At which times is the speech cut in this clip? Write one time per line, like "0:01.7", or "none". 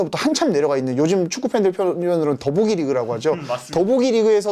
none